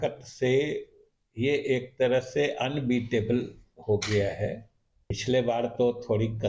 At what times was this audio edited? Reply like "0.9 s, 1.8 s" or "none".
5.2 s